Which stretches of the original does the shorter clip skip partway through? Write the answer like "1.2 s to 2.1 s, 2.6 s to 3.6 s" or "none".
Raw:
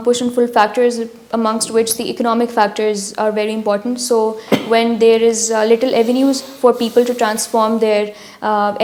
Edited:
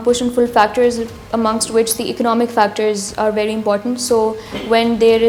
none